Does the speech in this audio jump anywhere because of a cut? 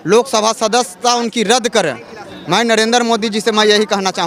no; 0 cuts

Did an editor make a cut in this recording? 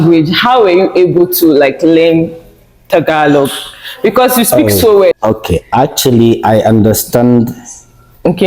yes; 1 cut; at 5.1 s

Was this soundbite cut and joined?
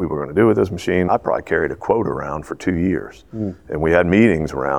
yes; 1 cut; at 1.1 s

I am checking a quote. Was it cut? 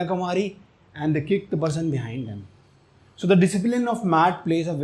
no; 0 cuts

